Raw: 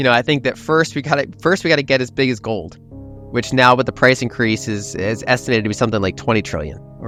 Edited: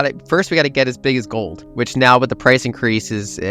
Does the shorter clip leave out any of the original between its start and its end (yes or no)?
yes